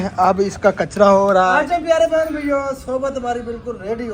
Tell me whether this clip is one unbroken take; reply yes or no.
no